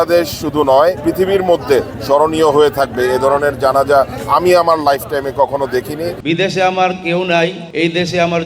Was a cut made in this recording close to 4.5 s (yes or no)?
no